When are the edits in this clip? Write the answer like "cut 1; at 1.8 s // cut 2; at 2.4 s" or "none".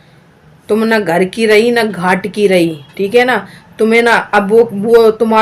none

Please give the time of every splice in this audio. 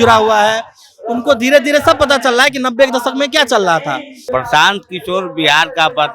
cut 1; at 4.1 s

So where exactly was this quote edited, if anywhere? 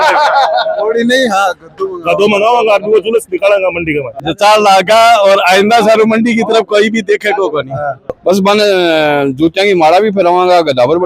cut 1; at 4.2 s // cut 2; at 8.1 s

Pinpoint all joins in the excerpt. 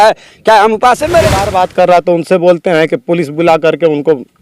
cut 1; at 1.5 s

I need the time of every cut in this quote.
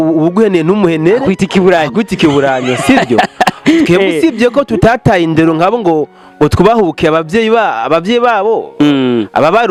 none

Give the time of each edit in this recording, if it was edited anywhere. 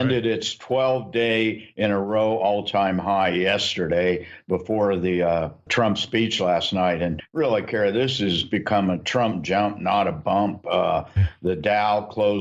cut 1; at 6.3 s

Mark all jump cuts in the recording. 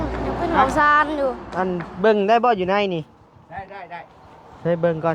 cut 1; at 1.4 s

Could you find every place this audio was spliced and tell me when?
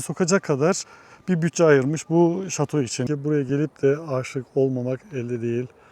cut 1; at 3.0 s

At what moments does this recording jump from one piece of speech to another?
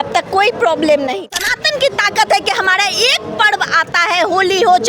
cut 1; at 1.3 s

